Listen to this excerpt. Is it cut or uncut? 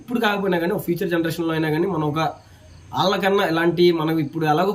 uncut